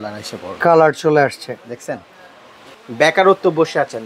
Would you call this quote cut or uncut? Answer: cut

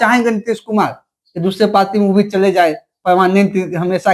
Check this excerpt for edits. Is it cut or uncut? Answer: uncut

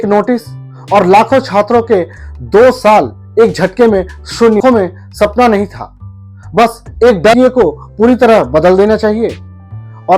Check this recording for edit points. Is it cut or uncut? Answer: cut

